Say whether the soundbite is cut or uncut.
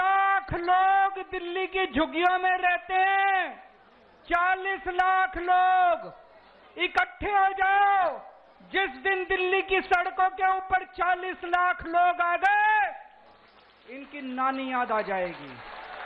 uncut